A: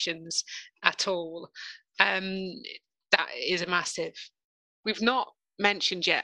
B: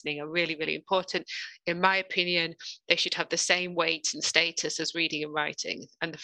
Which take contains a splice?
A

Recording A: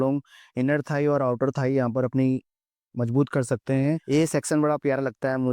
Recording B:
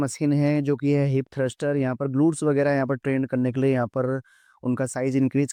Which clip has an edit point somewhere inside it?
A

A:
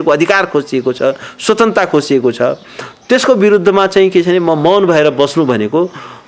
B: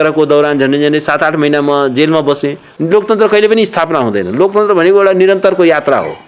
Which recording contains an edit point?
B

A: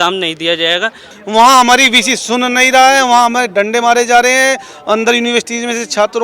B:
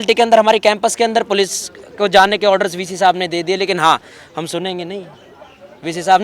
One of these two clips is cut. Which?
A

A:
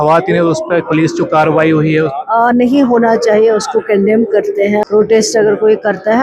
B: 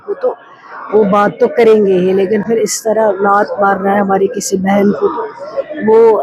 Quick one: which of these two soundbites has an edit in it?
A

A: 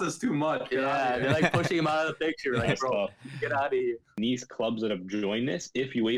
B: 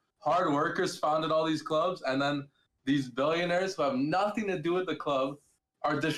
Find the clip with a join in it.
A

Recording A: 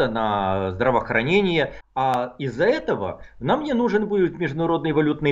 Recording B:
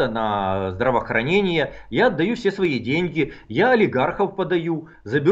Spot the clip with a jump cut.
A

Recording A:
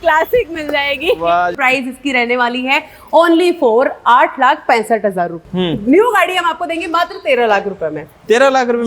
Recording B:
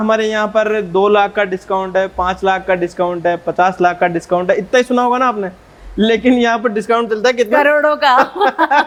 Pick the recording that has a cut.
A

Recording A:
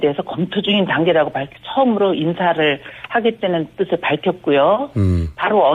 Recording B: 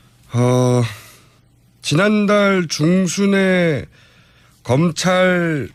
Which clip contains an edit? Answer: A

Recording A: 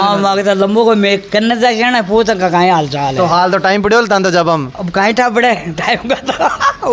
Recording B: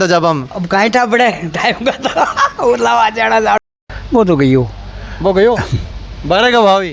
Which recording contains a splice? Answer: B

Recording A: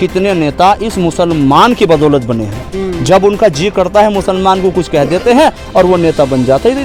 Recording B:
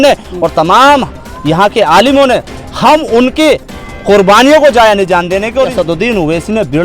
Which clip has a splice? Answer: B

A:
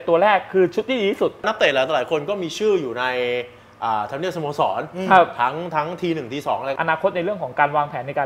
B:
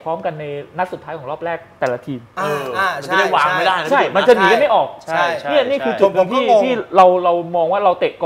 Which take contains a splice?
A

